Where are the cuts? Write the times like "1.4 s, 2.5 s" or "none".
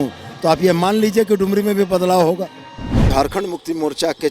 3.1 s